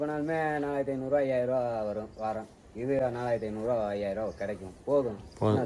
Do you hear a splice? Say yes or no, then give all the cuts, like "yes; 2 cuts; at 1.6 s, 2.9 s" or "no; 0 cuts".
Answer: no; 0 cuts